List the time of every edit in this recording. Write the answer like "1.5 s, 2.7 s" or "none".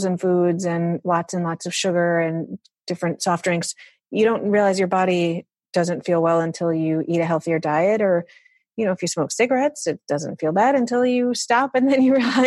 1.0 s, 2.6 s